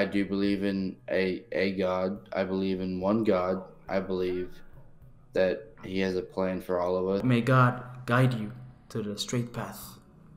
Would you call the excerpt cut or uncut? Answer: cut